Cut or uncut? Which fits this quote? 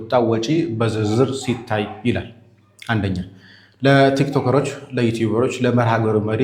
uncut